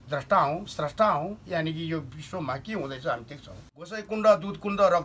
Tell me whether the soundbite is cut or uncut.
cut